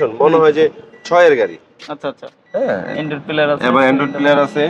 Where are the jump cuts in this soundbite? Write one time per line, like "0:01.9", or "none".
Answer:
none